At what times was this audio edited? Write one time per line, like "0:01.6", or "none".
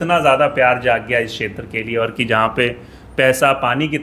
none